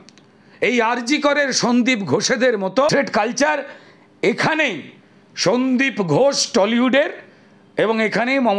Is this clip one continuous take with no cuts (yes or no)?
no